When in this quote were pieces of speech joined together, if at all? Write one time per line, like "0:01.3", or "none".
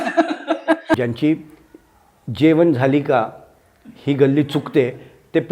0:01.0

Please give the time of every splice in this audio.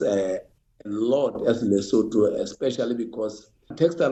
none

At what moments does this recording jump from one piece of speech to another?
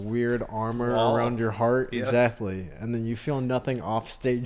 none

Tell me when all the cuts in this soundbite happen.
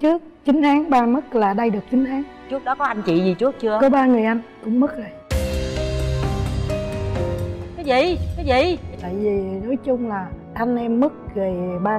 0:09.0

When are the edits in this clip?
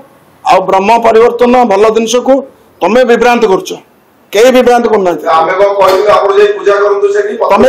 none

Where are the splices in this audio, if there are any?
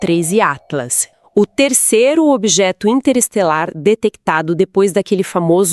0:01.1

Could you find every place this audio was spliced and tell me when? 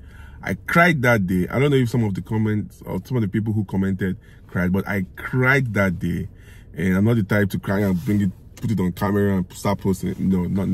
none

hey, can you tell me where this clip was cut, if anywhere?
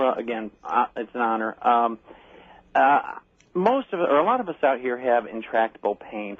none

